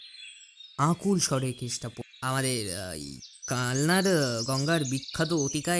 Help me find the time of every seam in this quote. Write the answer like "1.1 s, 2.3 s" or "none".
2.0 s